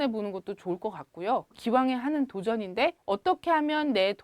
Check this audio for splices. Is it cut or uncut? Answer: cut